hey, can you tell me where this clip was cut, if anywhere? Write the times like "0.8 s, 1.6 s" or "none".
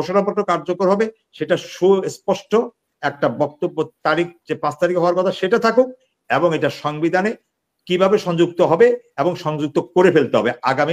none

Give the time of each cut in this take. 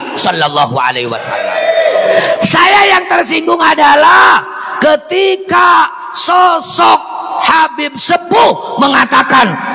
1.4 s

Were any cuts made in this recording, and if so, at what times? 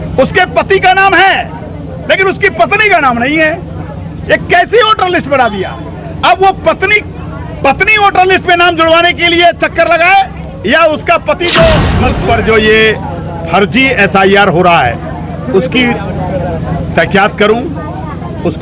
12.2 s

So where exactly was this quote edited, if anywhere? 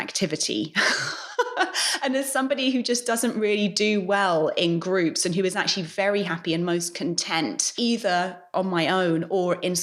7.7 s, 8.5 s

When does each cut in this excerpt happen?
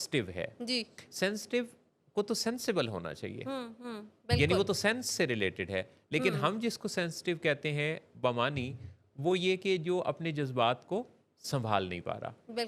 none

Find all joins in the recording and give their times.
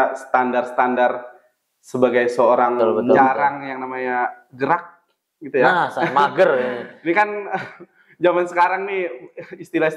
2.8 s

